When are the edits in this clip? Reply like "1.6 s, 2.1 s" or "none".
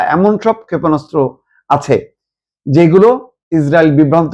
3.3 s